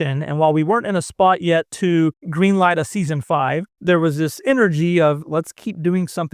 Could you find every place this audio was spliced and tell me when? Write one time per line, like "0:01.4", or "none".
0:02.2
0:03.7
0:05.2